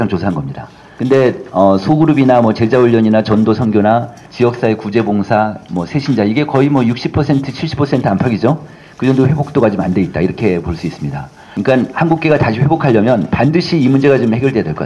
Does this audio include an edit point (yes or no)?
no